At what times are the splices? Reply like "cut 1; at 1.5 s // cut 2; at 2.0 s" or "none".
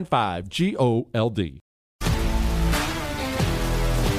cut 1; at 2.0 s